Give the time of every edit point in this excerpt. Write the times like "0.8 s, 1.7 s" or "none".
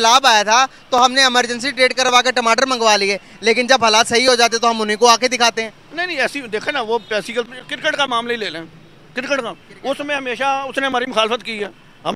7.4 s